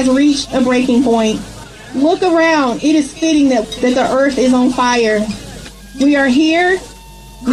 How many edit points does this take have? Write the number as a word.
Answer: one